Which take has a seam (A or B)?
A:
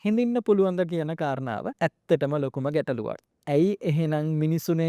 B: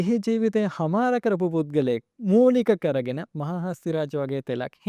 A